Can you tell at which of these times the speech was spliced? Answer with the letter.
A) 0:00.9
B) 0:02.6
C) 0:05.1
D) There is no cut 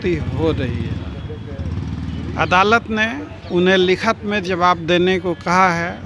D